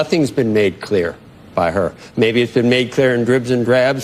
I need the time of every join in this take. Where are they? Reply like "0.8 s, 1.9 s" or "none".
none